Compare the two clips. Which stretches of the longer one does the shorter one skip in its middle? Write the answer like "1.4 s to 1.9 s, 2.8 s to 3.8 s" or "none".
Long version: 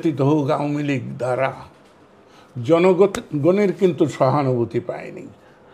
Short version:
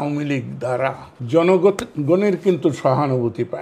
1.7 s to 2.5 s